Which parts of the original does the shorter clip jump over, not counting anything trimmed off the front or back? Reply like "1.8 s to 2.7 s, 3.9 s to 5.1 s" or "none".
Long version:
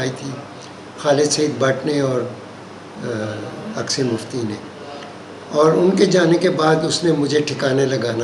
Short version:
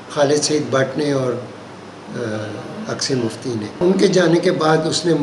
4.7 s to 5.8 s